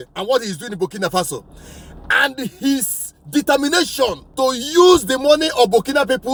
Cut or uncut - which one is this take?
uncut